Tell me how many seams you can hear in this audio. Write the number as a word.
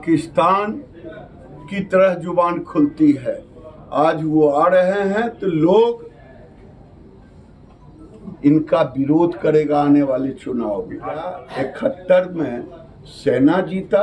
one